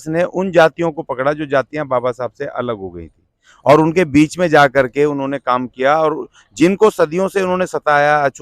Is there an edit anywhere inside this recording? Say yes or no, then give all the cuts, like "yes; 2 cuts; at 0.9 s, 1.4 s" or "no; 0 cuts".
no; 0 cuts